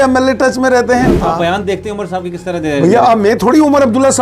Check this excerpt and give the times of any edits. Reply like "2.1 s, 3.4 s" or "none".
1.2 s